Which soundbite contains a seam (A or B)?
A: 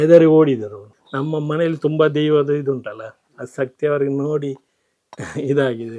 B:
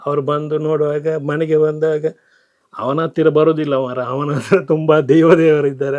A